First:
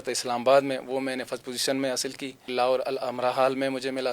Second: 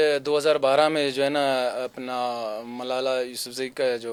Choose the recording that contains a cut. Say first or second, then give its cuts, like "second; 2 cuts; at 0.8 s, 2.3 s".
first; 1 cut; at 2.5 s